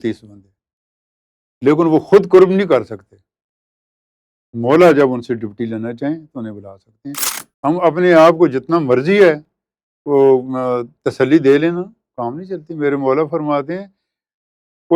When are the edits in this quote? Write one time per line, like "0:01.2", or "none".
0:07.3